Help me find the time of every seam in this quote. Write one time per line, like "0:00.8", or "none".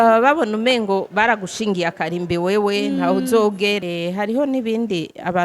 0:03.8